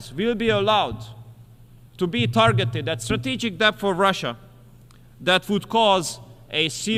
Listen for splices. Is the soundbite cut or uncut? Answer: uncut